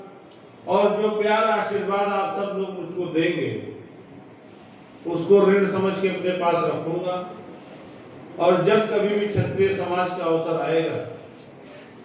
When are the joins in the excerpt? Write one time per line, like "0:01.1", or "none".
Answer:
none